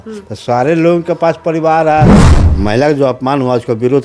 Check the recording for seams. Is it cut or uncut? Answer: cut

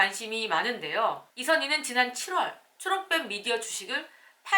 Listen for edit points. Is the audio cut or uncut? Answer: cut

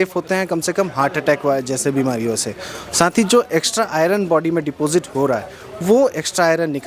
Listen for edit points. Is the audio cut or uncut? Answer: uncut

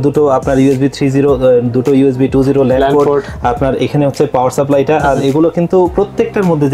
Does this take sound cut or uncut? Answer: uncut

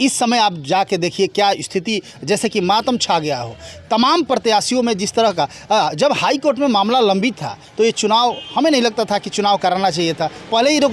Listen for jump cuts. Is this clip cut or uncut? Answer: uncut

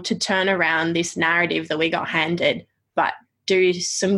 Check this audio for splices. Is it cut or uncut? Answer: uncut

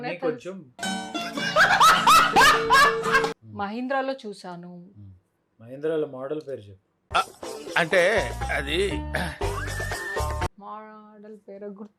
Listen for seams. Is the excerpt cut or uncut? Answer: cut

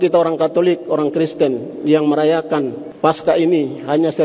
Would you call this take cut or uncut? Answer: cut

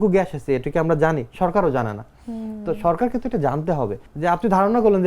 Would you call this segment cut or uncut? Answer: cut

